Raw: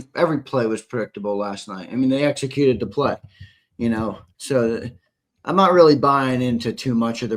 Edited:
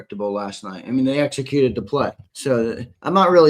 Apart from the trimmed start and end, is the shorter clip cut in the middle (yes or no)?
yes